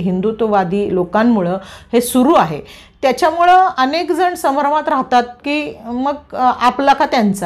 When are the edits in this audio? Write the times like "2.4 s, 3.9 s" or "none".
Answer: none